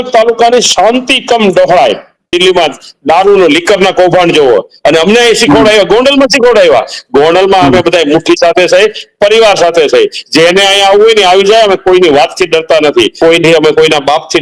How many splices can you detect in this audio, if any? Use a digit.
2